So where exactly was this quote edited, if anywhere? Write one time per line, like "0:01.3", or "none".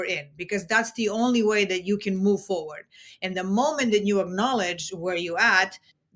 none